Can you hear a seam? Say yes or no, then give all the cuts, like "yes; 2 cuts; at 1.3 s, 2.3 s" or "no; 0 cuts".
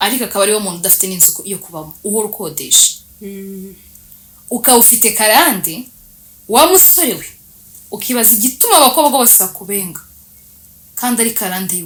no; 0 cuts